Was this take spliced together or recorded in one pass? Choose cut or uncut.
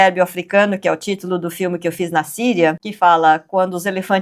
cut